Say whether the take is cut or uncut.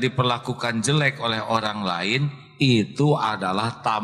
uncut